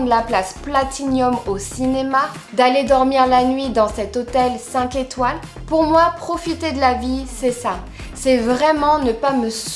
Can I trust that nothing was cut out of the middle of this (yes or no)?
yes